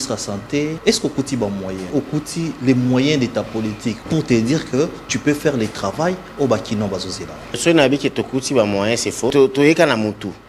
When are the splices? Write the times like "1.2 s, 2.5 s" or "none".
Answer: 0.8 s, 1.9 s, 4.0 s, 7.6 s, 9.3 s